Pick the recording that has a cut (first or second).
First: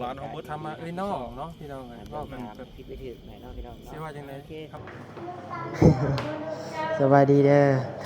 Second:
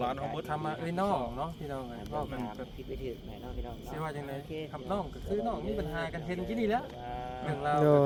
first